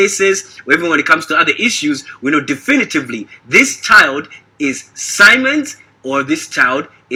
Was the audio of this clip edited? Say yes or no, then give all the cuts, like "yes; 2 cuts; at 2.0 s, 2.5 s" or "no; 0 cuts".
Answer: no; 0 cuts